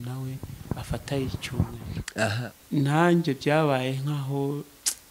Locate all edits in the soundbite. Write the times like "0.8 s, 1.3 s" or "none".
2.3 s

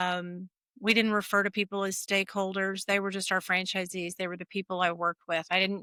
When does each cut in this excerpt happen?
none

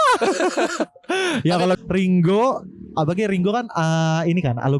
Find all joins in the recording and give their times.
1.8 s

